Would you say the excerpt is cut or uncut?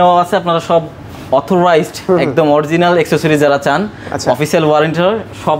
uncut